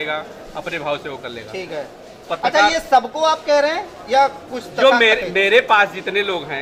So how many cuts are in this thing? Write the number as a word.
zero